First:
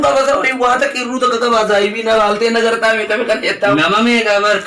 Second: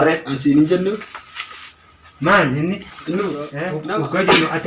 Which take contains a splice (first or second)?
second